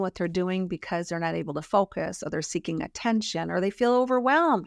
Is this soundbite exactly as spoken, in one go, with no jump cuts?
yes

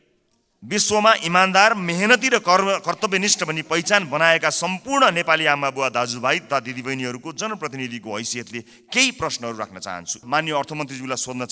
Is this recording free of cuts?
no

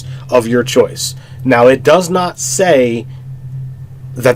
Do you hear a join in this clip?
no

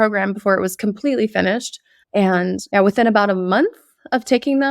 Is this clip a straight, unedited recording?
no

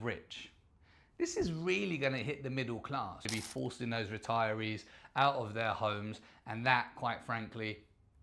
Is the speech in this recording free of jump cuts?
no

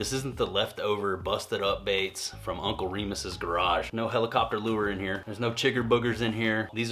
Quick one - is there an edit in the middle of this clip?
yes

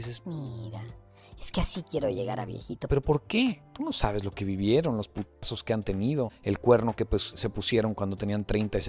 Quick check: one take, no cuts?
no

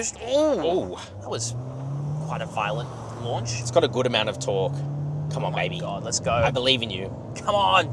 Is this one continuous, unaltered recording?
yes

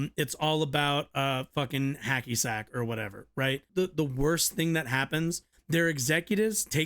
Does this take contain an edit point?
yes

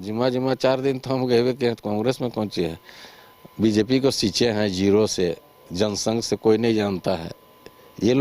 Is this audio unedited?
yes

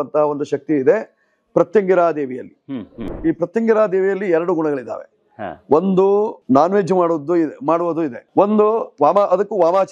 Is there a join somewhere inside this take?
yes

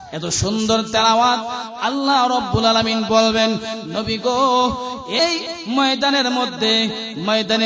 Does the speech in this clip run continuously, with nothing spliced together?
no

